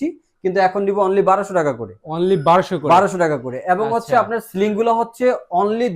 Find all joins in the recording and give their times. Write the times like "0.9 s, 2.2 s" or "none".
none